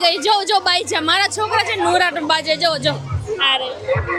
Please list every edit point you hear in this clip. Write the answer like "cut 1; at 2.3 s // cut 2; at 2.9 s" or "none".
none